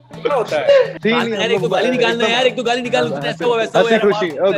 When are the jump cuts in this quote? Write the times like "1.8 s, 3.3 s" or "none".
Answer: 1.0 s